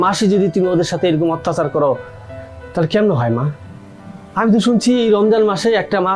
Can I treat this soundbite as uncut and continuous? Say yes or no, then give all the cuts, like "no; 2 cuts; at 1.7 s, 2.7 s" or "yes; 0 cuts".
yes; 0 cuts